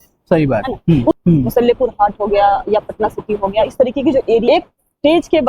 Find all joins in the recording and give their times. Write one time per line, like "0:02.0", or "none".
0:01.1
0:04.4